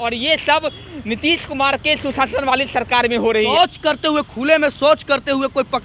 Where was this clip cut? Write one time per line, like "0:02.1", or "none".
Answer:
0:03.3